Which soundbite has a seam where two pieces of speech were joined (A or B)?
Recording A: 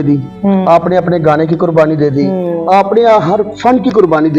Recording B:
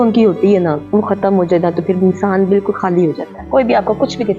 B